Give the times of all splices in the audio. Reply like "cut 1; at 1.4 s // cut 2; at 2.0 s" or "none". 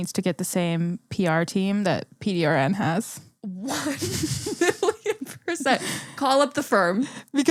none